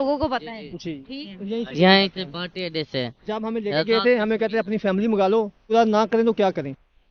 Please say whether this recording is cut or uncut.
cut